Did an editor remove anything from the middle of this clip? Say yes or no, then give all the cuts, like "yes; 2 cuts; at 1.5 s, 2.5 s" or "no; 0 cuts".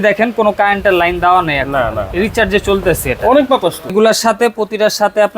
yes; 1 cut; at 3.9 s